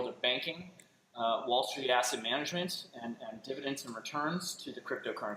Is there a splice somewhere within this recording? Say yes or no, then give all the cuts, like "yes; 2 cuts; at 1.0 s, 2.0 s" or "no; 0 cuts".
no; 0 cuts